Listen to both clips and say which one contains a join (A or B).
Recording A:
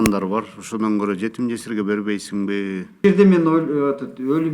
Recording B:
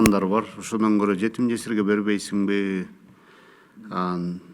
A